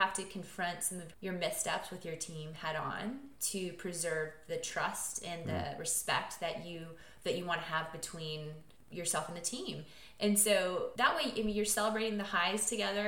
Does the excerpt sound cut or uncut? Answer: cut